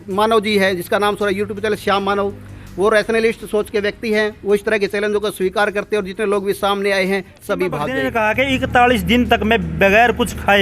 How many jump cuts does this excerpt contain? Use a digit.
1